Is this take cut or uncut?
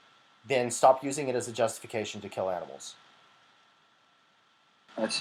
uncut